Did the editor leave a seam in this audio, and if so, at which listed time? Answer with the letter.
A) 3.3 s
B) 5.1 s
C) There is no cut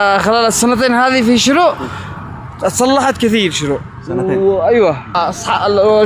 B